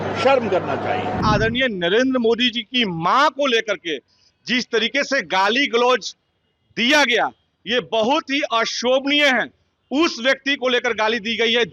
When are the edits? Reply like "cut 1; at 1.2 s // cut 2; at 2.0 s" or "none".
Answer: cut 1; at 1.2 s